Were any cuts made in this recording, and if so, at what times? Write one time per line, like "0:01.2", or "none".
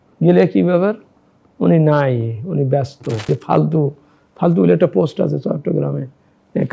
0:03.3